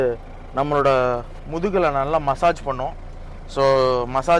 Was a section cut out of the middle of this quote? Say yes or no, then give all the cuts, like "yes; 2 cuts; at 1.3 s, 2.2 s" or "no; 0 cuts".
no; 0 cuts